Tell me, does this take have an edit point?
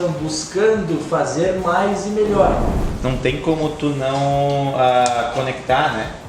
yes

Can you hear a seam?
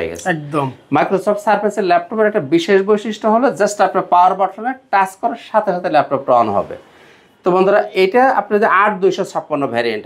no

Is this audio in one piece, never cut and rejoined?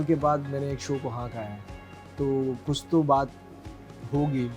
yes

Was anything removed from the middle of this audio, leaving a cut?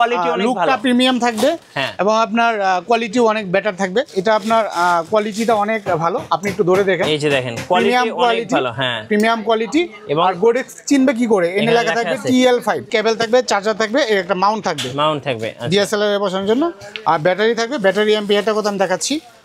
yes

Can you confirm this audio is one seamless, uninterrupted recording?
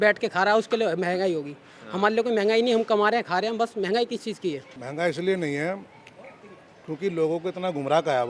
no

